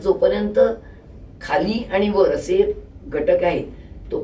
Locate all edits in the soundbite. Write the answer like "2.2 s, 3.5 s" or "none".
none